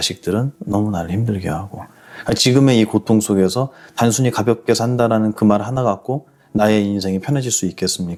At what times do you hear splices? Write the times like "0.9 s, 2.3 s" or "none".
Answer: none